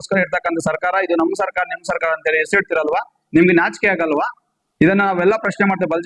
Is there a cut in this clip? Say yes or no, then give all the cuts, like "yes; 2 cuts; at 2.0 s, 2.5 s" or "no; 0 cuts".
no; 0 cuts